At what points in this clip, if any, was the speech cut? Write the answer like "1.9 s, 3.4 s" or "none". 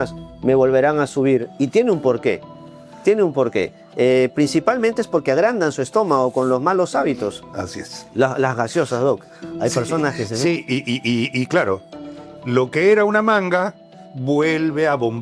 none